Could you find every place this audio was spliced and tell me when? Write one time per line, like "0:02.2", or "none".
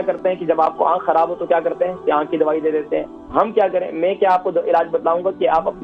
none